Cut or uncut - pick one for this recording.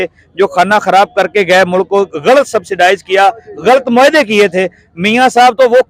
uncut